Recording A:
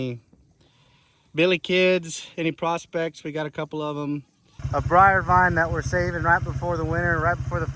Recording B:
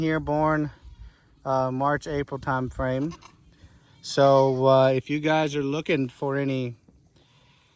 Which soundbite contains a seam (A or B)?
A